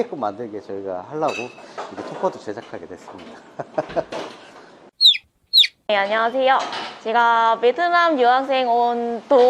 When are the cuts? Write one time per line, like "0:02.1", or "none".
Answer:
none